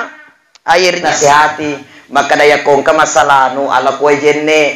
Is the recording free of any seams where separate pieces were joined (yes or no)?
no